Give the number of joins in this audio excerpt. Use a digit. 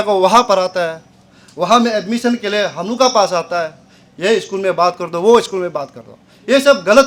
0